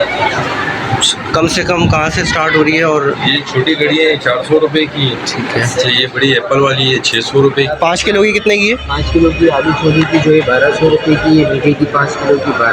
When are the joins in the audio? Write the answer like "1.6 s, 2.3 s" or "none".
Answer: 7.7 s